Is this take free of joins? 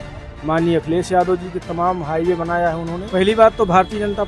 no; 1 cut; at 3.0 s

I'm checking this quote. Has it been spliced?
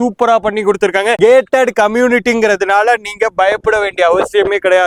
no; 0 cuts

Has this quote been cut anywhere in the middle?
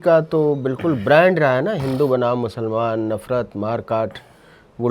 no; 0 cuts

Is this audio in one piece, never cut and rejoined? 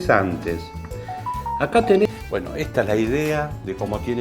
no; 1 cut; at 2.1 s

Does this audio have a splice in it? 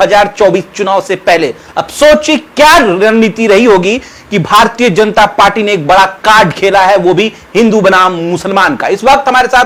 no; 0 cuts

